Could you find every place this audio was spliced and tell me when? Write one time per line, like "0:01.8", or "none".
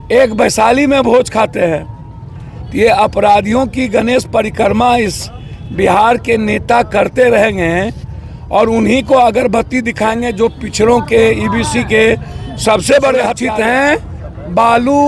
0:13.4